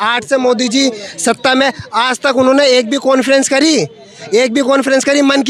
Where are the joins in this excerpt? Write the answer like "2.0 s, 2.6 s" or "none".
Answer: none